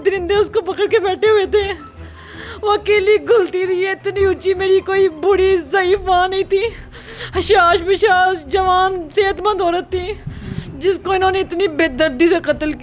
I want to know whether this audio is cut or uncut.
uncut